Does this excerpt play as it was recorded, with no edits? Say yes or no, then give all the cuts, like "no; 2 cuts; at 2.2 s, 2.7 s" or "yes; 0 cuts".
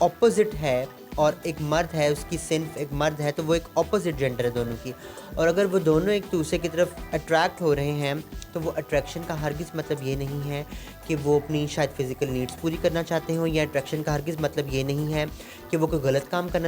yes; 0 cuts